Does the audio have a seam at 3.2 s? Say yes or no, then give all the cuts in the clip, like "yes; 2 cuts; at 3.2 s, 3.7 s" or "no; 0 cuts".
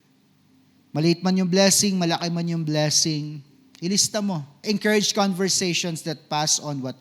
no; 1 cut; at 4.6 s